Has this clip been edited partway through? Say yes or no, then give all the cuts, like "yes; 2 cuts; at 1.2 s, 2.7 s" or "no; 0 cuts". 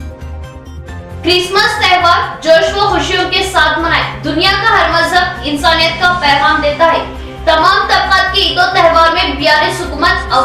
no; 0 cuts